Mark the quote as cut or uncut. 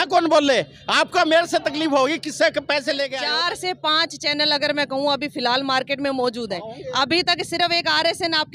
cut